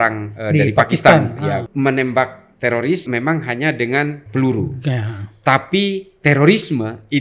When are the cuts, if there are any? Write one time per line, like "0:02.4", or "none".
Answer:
0:01.7
0:03.1
0:04.2